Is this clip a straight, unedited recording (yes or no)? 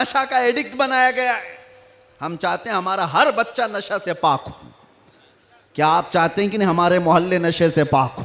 yes